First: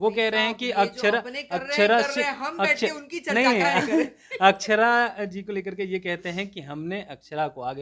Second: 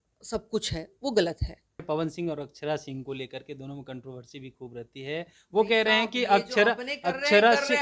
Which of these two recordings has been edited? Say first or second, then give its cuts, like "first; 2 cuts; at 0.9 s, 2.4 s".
second; 1 cut; at 1.8 s